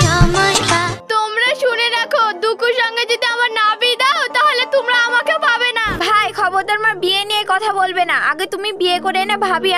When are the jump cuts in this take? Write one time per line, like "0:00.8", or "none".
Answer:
0:00.9
0:05.8

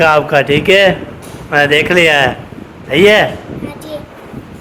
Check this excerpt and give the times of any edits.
none

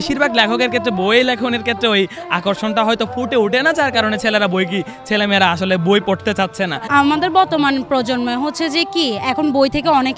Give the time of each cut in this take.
none

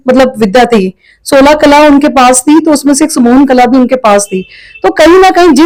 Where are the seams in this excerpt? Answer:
none

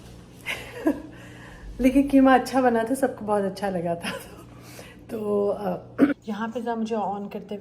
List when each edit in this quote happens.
0:06.2

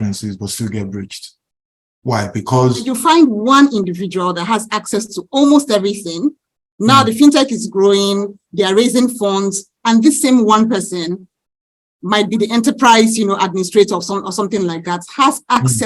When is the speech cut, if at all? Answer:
0:02.9

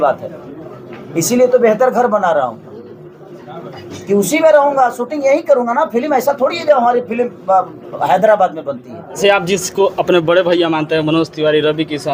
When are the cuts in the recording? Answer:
0:09.2

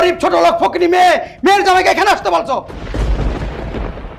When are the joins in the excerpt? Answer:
0:02.9

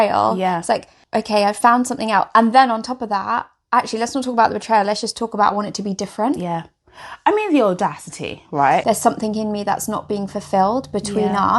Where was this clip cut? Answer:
0:00.9
0:08.8

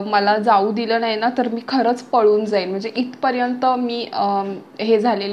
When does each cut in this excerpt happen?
none

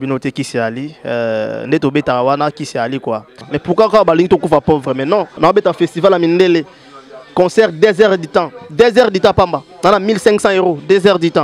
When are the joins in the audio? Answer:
0:03.5
0:05.4

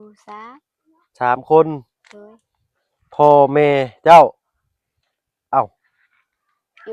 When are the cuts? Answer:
none

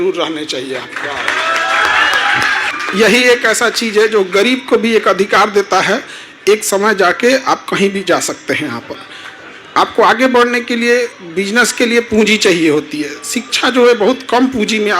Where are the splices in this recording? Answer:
0:02.7

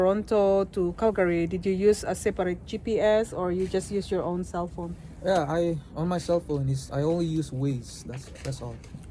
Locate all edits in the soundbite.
none

